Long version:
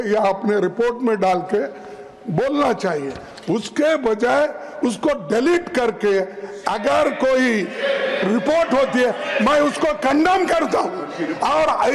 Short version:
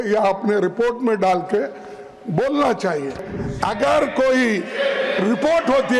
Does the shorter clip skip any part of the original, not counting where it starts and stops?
yes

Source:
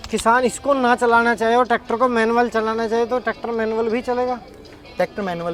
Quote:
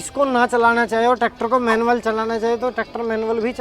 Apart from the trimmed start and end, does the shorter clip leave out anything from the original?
no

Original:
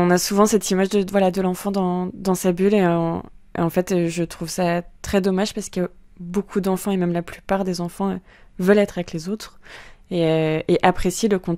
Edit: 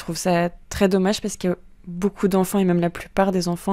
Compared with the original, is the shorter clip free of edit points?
yes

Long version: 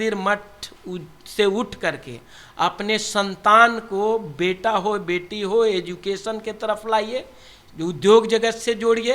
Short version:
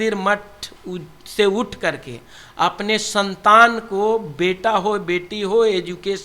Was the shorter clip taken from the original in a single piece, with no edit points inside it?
yes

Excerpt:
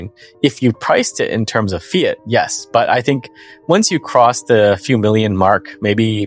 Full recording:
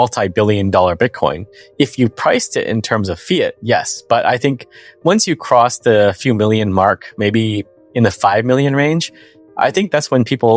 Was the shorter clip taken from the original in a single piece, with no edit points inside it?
yes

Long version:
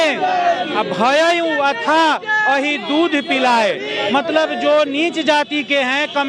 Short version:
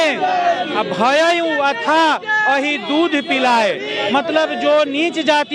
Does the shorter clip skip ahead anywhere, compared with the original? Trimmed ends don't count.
no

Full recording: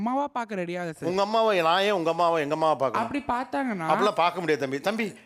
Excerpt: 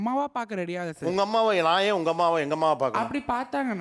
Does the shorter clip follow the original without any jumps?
yes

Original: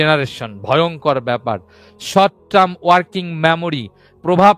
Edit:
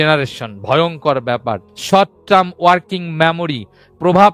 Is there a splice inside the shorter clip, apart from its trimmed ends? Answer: yes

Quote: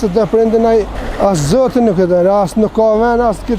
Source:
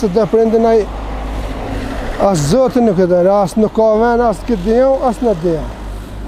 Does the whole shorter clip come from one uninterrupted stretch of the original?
no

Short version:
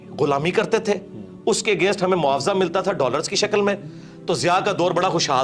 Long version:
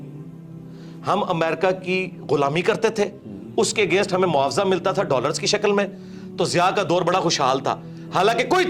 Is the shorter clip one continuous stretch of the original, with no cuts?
yes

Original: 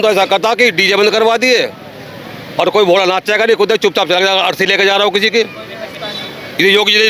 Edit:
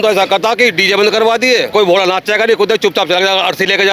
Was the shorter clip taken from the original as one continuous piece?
no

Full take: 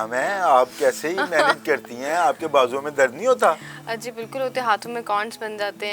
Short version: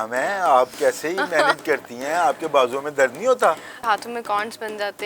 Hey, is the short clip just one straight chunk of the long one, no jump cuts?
no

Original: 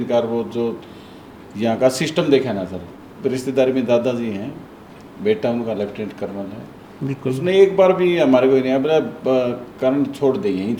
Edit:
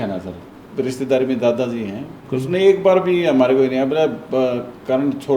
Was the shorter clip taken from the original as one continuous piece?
no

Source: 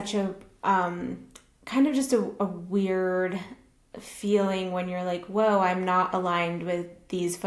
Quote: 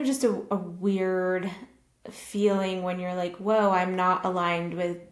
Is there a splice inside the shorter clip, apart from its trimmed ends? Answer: no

